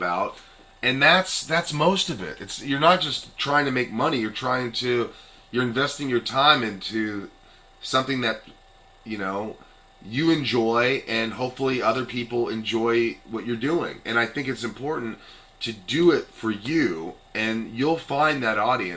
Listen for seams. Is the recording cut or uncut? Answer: uncut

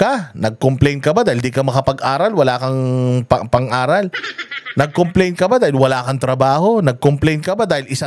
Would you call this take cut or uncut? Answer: uncut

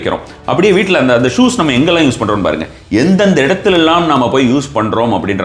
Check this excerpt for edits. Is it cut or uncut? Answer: uncut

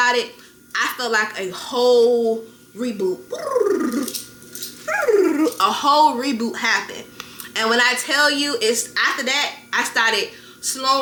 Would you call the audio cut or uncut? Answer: uncut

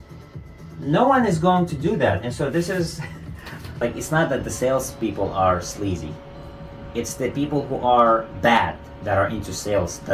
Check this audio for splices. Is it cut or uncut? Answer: cut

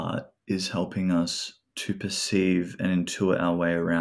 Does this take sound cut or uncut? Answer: uncut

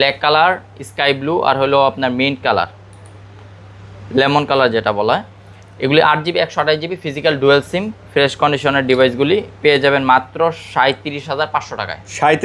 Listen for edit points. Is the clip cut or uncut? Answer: uncut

